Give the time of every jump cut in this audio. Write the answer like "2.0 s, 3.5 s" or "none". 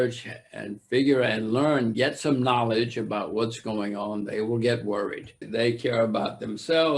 5.5 s